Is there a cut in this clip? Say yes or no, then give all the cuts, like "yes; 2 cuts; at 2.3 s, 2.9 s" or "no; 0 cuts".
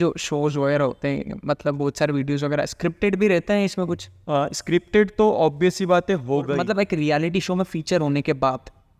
yes; 1 cut; at 6.6 s